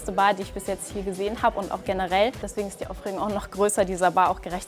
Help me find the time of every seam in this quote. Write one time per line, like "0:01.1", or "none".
0:02.4